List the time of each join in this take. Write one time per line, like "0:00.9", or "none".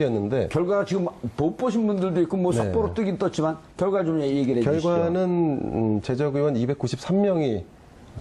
0:04.5